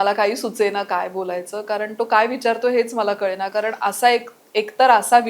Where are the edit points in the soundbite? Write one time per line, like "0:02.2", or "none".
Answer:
none